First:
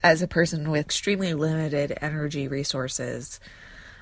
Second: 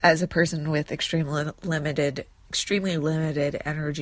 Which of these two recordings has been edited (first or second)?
first